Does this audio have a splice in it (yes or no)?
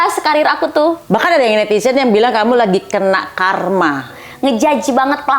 yes